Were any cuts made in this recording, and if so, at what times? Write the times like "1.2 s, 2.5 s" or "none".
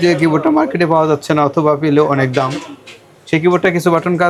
none